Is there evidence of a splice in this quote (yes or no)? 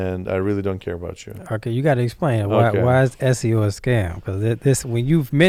no